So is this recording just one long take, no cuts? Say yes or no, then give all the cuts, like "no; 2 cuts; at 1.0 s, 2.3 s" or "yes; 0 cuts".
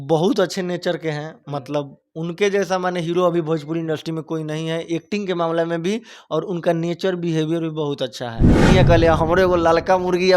no; 1 cut; at 8.7 s